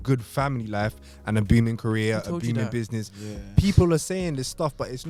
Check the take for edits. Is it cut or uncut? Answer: uncut